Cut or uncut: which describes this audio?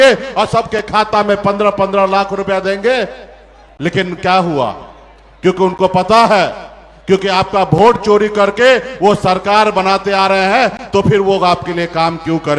uncut